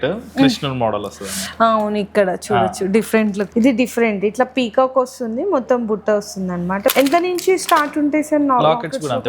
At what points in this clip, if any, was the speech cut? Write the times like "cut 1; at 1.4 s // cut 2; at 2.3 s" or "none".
cut 1; at 3.4 s // cut 2; at 6.9 s